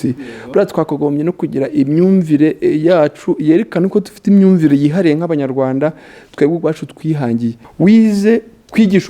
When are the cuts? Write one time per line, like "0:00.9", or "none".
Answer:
0:07.6